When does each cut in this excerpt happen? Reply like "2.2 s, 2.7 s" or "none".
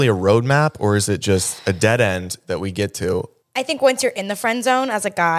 3.4 s